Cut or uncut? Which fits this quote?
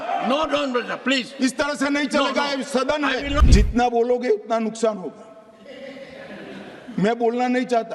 cut